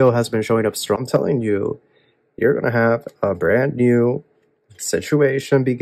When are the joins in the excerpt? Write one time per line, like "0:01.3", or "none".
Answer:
0:01.0